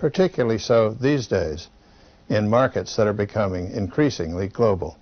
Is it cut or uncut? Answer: uncut